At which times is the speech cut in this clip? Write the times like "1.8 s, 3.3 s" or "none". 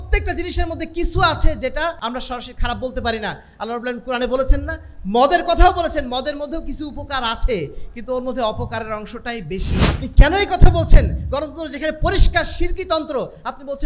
2.0 s, 9.8 s